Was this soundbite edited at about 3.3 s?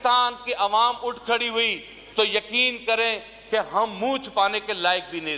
no; 0 cuts

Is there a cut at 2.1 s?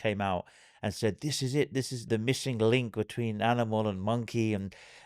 yes; 1 cut; at 2.1 s

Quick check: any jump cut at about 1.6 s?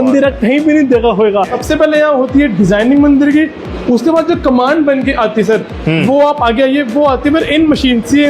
yes; 1 cut; at 1.6 s

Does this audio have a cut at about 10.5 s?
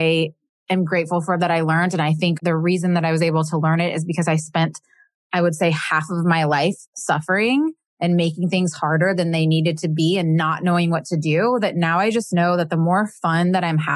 no; 1 cut; at 2.4 s

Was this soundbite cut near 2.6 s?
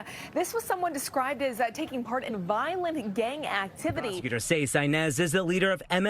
no; 1 cut; at 4.1 s

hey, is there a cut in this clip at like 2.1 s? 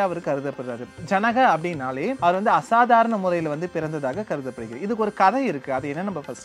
yes; 1 cut; at 2.1 s

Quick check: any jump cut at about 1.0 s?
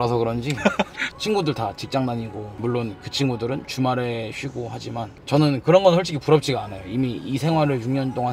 yes; 1 cut; at 1.0 s

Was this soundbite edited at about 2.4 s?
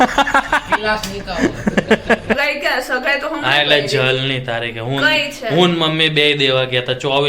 yes; 1 cut; at 2.4 s

